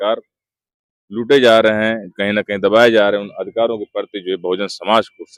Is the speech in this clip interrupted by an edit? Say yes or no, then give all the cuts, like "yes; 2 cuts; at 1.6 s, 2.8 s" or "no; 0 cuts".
no; 0 cuts